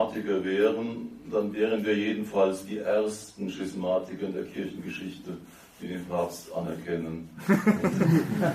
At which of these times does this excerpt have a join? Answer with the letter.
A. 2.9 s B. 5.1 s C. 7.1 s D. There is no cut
D